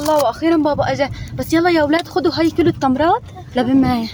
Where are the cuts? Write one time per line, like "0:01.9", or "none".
none